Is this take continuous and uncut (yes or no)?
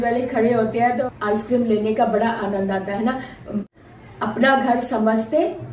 no